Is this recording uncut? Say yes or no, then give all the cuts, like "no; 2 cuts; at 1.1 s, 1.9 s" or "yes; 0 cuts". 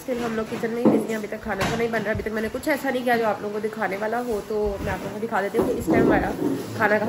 yes; 0 cuts